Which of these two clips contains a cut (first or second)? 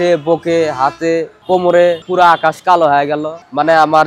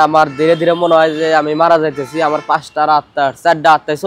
first